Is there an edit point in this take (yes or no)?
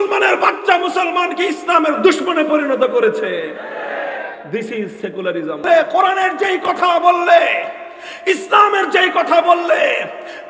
yes